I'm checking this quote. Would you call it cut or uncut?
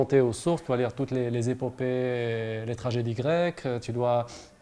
uncut